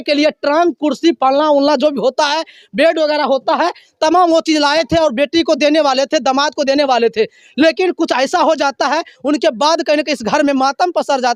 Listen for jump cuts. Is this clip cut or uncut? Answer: uncut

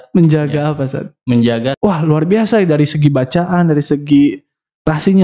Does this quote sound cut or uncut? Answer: cut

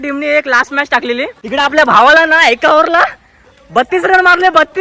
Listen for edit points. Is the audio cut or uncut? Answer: cut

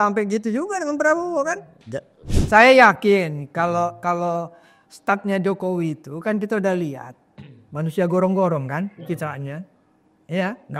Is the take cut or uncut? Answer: cut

